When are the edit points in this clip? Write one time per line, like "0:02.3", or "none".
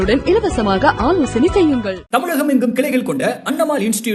none